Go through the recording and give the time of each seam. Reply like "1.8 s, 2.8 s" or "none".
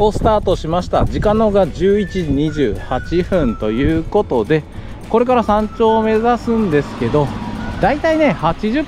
none

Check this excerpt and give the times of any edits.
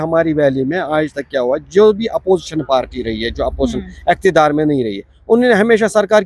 none

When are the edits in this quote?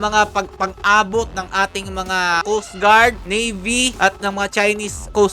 2.4 s, 3.6 s

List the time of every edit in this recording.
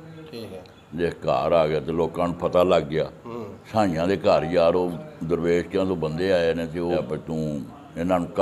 7.0 s

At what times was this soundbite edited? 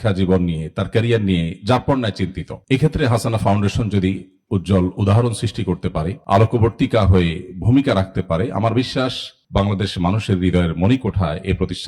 none

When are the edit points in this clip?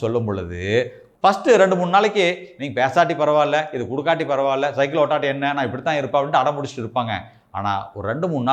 1.0 s

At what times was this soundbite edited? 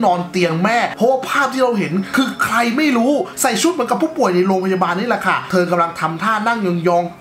0.9 s, 3.3 s

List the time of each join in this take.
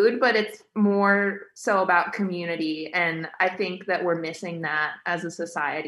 none

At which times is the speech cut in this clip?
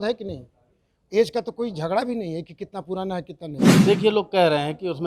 3.7 s

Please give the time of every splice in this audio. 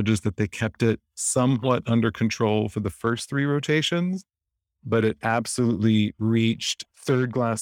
none

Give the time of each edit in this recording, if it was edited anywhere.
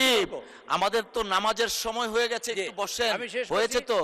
none

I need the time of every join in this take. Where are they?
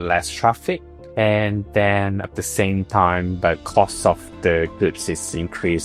none

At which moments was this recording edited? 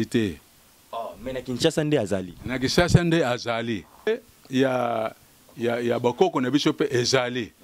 4.1 s

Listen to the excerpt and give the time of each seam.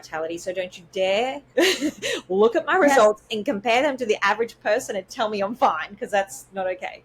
none

